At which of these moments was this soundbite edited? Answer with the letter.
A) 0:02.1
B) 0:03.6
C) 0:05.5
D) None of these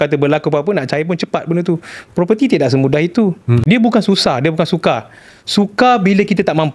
B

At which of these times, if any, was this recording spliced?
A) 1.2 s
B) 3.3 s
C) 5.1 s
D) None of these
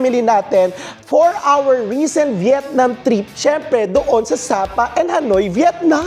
D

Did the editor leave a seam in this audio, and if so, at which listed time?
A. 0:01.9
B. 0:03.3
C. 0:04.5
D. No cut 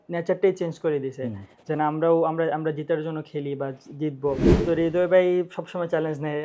C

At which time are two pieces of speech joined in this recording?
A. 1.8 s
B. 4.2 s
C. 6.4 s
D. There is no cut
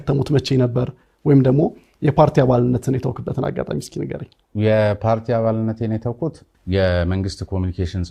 D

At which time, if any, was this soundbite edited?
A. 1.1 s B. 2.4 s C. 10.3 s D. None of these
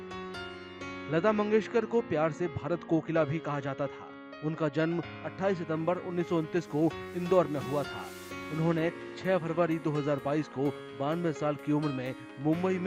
A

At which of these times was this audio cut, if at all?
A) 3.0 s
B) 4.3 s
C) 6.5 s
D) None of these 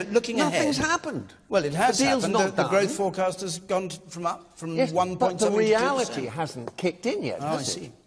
D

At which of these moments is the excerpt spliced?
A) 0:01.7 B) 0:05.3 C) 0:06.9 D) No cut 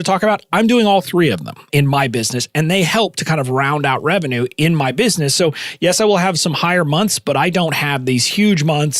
A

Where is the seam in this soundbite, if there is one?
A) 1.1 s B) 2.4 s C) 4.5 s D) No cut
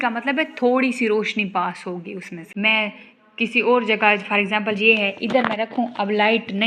B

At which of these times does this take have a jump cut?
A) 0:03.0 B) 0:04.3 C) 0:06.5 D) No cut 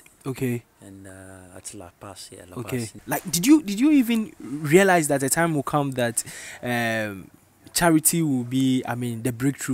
A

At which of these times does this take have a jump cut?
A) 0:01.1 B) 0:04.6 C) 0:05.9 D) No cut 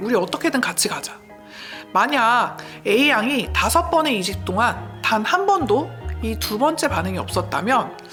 D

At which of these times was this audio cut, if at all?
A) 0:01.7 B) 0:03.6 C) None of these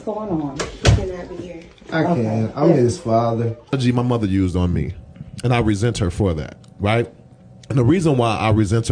B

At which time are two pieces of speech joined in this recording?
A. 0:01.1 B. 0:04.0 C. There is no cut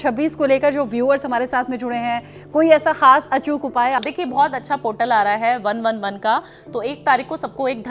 B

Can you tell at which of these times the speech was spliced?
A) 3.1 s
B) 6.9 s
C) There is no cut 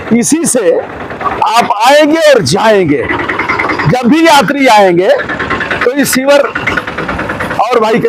C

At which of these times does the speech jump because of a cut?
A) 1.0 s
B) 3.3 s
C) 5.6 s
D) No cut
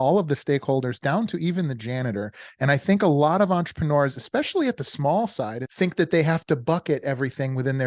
C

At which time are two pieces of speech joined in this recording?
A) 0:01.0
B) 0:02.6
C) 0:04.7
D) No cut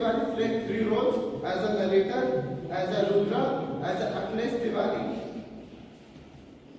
D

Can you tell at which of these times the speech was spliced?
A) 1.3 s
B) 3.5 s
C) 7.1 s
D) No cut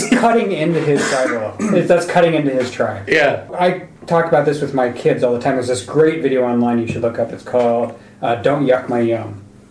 B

